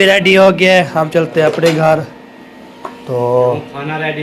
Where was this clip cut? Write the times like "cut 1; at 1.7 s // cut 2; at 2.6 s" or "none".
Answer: none